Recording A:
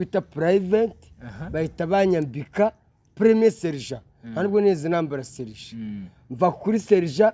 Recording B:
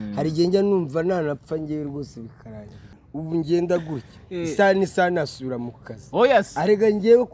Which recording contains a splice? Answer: B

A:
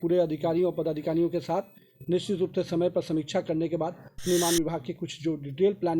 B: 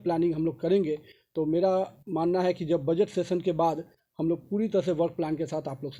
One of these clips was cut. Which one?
A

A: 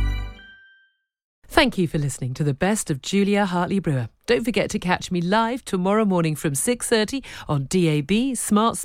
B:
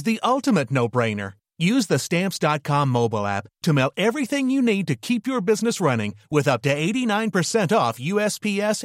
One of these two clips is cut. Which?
A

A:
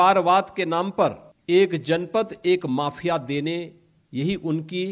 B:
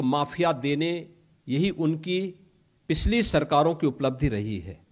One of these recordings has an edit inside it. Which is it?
A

